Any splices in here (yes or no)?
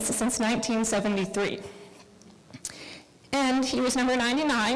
no